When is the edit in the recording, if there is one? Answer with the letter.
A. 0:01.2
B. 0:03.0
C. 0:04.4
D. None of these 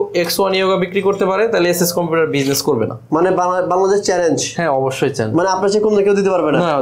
B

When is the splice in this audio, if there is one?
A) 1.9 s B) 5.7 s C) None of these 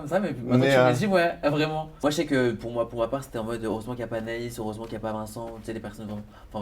A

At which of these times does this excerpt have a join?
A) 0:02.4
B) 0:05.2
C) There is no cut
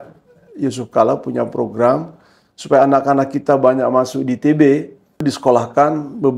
B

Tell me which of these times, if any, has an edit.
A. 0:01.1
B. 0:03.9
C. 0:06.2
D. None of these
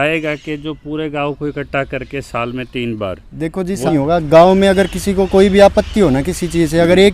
B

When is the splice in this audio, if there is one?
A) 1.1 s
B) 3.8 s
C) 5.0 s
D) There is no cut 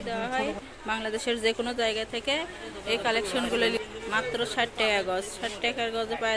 B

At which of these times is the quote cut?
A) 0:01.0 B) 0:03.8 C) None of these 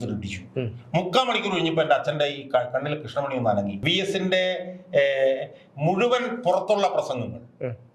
B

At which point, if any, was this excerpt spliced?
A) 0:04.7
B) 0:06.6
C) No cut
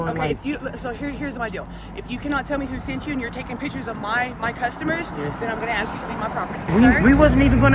B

